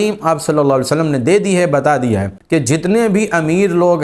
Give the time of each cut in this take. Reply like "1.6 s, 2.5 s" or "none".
2.3 s

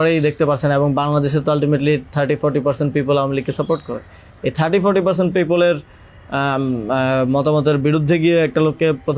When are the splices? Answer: none

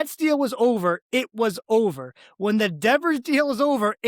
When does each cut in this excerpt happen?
none

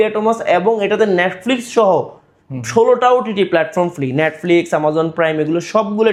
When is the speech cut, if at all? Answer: none

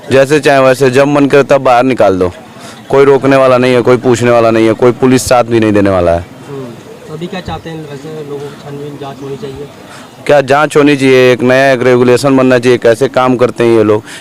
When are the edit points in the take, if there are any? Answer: none

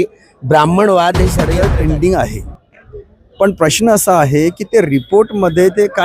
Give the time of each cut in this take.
1.5 s

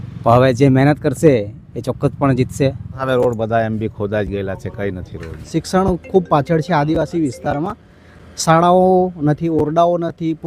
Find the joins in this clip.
2.9 s, 5.4 s

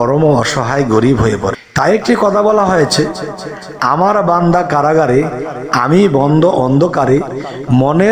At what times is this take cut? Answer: 1.6 s

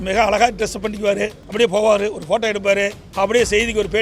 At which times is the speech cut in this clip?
1.4 s, 3.0 s

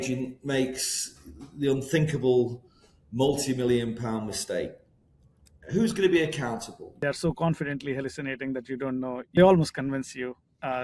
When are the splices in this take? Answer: 7.0 s, 9.4 s

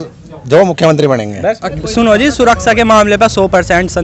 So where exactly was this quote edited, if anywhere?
1.7 s

